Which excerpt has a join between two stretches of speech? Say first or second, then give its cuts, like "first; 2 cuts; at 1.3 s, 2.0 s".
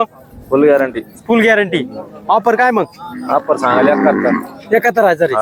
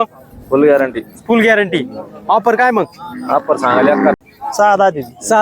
second; 1 cut; at 4.2 s